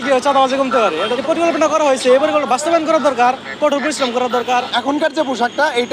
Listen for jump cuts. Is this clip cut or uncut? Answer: cut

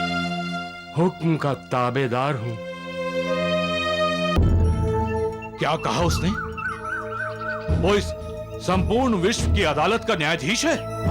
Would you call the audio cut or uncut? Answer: cut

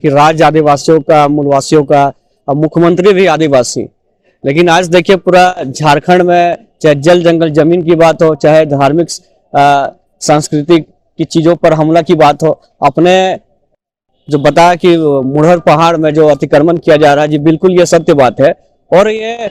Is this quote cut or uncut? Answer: uncut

